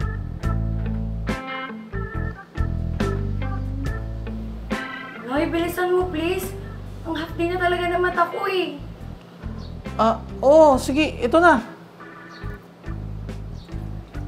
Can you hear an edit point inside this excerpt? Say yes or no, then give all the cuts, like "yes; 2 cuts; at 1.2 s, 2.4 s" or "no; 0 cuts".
no; 0 cuts